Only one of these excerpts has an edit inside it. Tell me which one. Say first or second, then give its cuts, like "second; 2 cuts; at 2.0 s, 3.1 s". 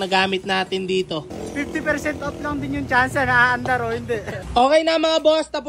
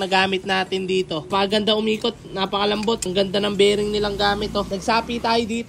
first; 2 cuts; at 1.2 s, 4.4 s